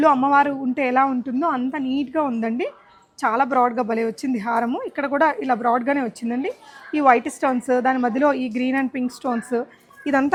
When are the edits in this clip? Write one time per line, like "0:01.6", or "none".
none